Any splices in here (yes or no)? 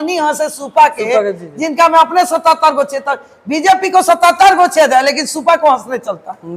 no